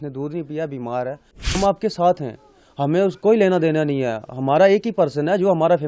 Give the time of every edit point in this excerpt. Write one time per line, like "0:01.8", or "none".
0:01.6